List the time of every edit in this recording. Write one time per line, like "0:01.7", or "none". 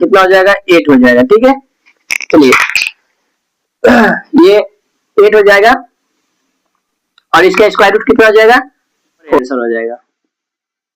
0:09.4